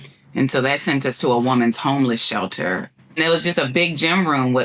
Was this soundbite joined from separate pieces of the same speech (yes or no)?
yes